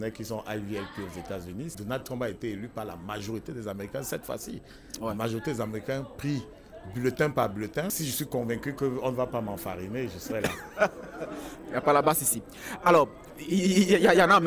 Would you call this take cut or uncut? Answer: cut